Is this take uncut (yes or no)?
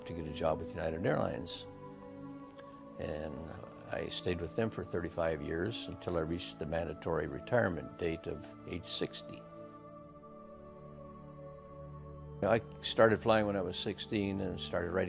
no